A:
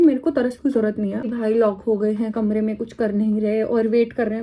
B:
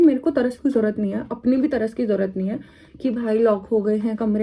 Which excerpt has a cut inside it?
A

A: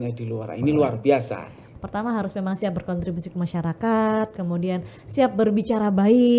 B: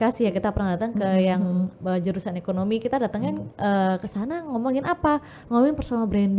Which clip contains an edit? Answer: A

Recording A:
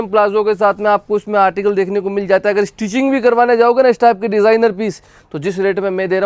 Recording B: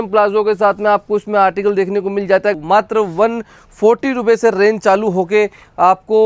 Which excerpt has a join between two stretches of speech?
B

